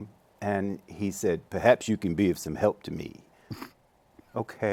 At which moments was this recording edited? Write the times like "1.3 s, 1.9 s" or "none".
none